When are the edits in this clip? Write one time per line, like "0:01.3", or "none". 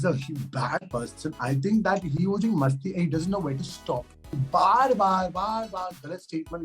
0:04.4

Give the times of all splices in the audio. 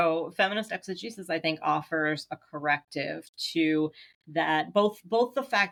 none

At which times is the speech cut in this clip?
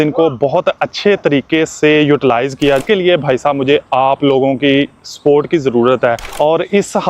0:02.8
0:06.3

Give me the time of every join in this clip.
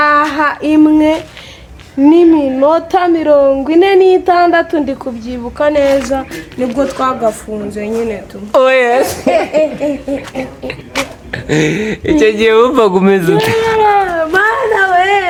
none

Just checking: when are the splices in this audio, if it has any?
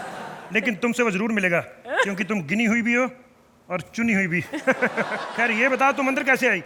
none

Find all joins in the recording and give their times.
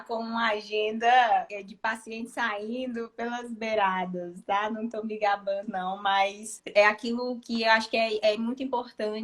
0:01.5
0:06.5

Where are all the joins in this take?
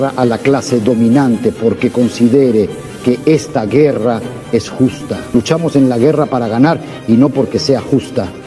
0:05.2

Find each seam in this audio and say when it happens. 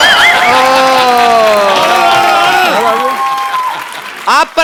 none

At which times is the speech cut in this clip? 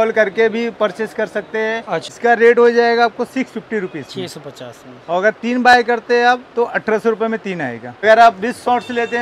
0:02.1
0:08.0

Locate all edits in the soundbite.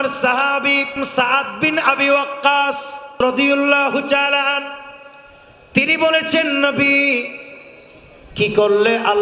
0:01.0
0:03.1

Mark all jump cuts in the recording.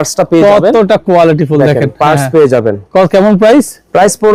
none

